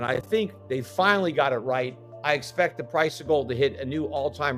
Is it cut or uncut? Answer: cut